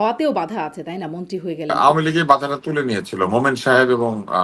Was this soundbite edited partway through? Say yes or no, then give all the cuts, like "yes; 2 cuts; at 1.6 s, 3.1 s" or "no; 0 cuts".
yes; 1 cut; at 1.7 s